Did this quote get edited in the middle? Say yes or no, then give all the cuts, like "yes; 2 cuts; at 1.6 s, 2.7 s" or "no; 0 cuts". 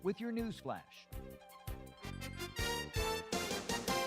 yes; 1 cut; at 1.0 s